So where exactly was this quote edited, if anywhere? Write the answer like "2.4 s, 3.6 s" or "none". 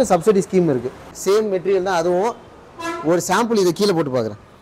1.1 s